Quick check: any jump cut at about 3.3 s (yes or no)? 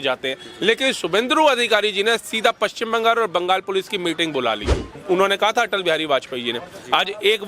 no